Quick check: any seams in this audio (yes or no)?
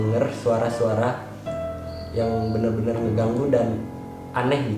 no